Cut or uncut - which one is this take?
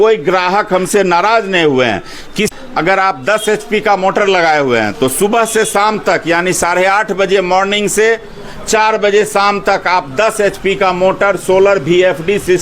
cut